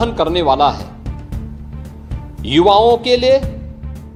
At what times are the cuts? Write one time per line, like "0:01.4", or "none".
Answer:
none